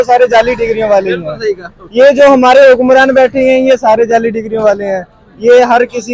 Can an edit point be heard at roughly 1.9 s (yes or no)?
no